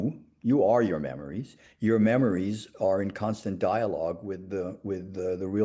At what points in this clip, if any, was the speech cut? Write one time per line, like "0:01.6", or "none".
none